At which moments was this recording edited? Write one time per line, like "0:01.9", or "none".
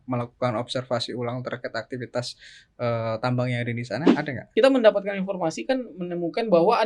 0:04.3

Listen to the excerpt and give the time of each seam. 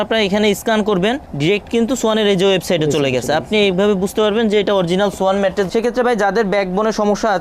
0:05.7

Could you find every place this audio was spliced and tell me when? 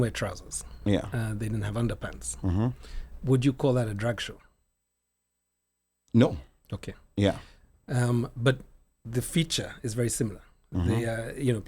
none

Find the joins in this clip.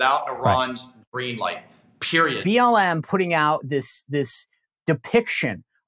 0:02.4

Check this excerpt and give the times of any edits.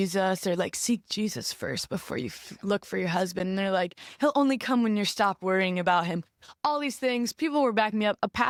none

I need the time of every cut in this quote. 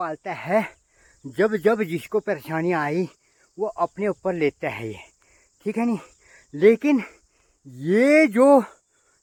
none

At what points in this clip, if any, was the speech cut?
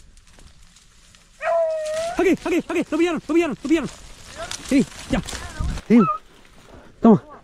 0:05.8

